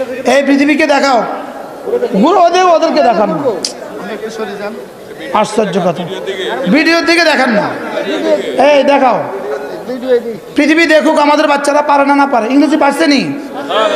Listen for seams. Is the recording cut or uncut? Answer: uncut